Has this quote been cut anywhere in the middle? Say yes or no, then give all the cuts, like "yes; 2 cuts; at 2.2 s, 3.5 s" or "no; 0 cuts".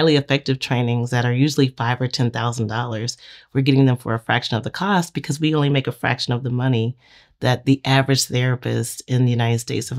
no; 0 cuts